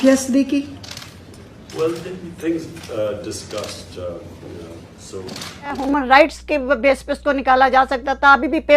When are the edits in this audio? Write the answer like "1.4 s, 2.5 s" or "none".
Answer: 5.8 s